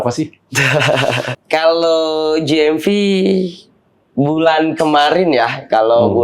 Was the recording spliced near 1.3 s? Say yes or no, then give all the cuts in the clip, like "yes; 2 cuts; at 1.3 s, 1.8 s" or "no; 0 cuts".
yes; 1 cut; at 1.3 s